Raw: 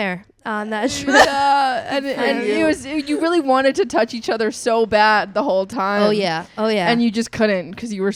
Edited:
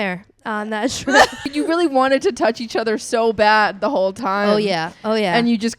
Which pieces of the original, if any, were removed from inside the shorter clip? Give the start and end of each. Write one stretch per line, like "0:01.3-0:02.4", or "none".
0:01.3-0:02.8

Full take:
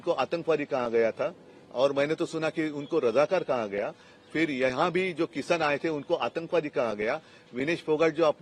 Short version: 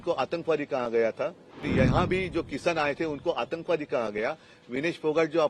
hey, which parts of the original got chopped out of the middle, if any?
0:01.7-0:04.5

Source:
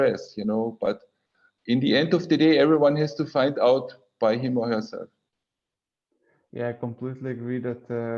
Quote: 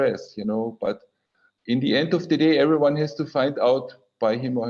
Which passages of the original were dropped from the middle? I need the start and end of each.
none

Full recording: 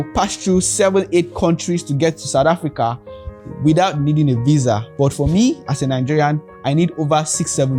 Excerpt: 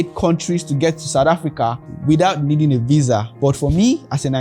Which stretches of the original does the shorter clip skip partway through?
0:03.1-0:03.4

